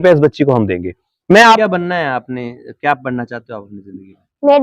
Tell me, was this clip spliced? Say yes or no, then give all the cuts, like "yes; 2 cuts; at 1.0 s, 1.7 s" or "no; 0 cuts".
yes; 1 cut; at 1.6 s